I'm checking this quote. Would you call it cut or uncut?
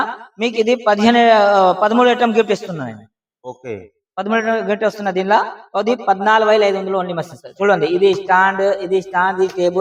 uncut